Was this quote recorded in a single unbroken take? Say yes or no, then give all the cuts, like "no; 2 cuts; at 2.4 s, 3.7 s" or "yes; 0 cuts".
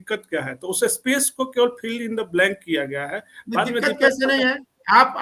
yes; 0 cuts